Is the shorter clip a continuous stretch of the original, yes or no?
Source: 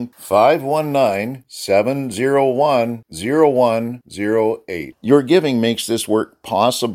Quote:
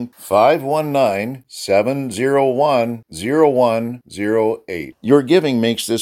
yes